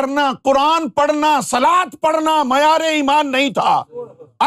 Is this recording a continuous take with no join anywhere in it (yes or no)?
yes